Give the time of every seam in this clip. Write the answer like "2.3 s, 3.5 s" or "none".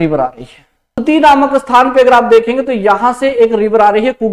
1.0 s